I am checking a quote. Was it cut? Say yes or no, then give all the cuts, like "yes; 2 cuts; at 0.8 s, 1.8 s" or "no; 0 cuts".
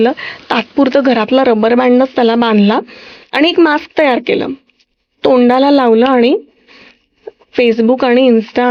no; 0 cuts